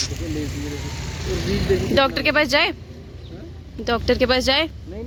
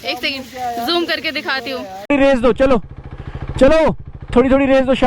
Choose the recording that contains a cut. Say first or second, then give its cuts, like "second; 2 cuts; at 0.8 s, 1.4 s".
second; 1 cut; at 2.1 s